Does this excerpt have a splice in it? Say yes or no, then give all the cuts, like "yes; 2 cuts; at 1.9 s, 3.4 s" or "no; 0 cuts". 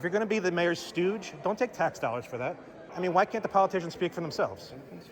yes; 1 cut; at 2.8 s